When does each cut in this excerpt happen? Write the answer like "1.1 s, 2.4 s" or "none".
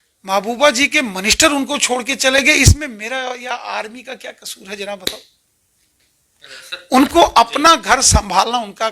none